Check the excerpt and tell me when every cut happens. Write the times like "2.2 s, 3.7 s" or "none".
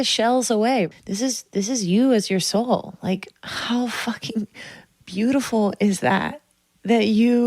0.9 s